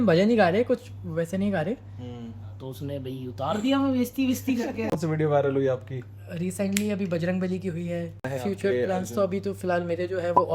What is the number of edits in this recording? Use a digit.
2